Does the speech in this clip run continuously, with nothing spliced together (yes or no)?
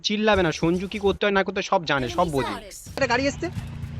no